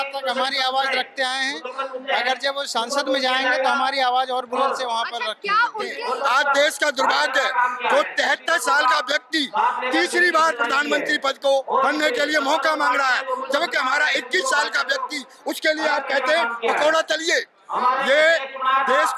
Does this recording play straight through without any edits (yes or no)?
no